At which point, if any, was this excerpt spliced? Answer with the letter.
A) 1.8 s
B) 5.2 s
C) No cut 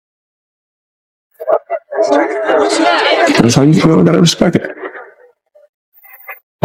C